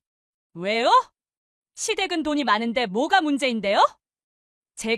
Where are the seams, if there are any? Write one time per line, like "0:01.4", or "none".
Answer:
none